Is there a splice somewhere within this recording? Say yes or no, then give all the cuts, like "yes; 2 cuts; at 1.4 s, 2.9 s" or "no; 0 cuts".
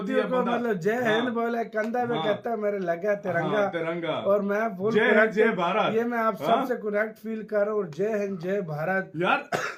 no; 0 cuts